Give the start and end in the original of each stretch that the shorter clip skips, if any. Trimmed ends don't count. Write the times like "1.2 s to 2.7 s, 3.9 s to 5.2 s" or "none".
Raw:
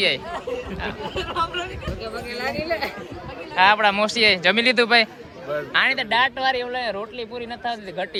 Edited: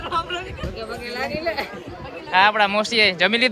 none